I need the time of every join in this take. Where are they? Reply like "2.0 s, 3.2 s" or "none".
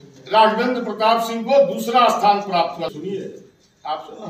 2.9 s